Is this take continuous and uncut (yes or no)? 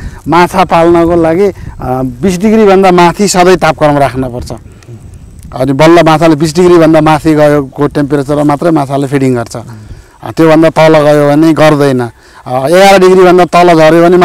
yes